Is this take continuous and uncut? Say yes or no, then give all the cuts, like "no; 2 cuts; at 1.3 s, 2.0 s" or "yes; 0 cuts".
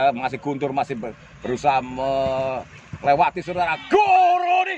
yes; 0 cuts